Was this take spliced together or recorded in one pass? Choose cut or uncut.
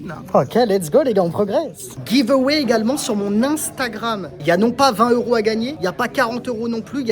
cut